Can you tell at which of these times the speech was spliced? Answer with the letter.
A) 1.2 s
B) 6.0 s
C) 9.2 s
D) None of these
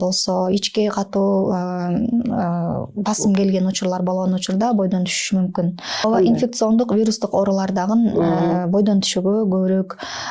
B